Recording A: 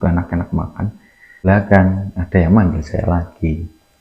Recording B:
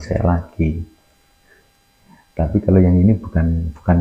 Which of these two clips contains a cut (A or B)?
A